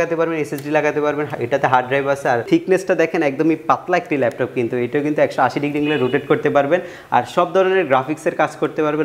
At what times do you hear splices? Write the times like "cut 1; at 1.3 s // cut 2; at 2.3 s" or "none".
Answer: cut 1; at 2.5 s